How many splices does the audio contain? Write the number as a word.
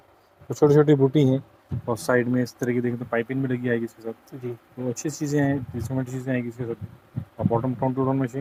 zero